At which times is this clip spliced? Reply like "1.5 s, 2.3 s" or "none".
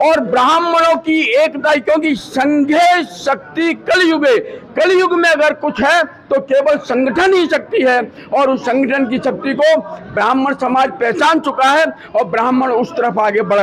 none